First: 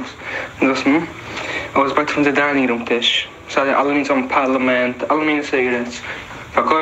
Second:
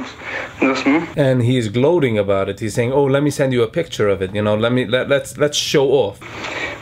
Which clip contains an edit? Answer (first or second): first